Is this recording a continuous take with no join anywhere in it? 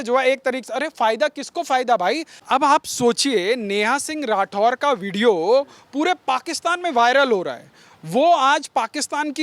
no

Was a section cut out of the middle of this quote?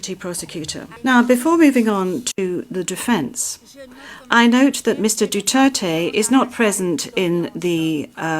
yes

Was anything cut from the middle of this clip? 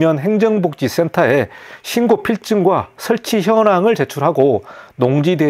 no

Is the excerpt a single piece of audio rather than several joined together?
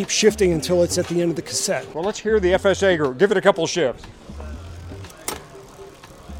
no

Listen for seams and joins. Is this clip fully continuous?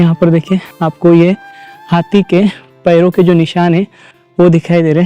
yes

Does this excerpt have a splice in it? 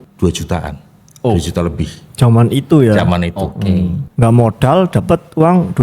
yes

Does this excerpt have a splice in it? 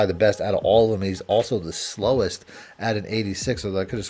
no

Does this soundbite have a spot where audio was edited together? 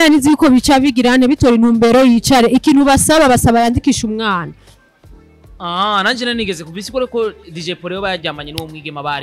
no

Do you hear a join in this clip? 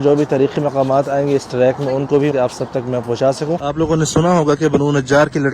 yes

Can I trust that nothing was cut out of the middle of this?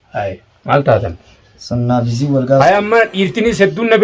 yes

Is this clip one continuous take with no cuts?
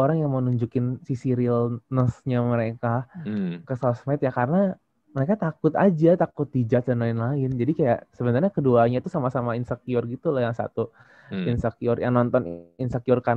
yes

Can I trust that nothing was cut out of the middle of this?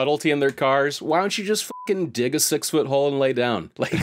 yes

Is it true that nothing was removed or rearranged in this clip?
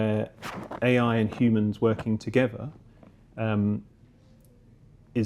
yes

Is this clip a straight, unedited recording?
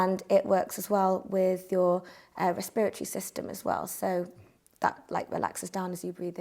yes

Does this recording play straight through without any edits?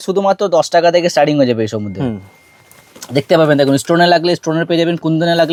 yes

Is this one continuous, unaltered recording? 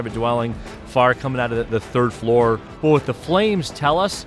no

